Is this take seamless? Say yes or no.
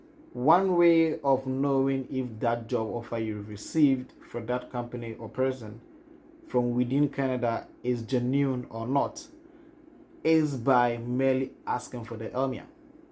yes